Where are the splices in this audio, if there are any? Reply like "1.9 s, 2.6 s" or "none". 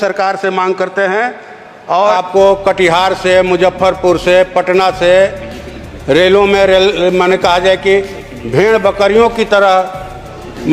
2.1 s